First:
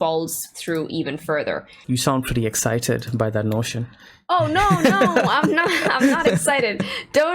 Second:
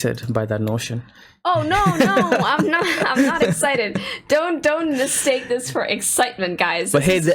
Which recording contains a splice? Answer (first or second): first